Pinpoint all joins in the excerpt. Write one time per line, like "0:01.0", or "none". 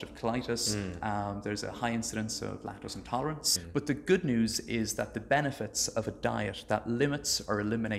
0:03.5